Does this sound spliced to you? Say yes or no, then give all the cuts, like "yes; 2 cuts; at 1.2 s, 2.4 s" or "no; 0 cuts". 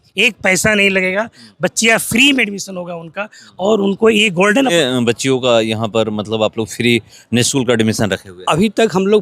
yes; 1 cut; at 4.7 s